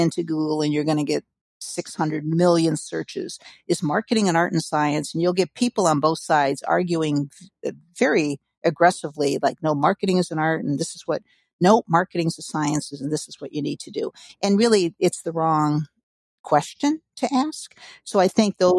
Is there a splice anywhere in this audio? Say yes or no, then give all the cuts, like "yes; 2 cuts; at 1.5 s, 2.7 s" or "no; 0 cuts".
no; 0 cuts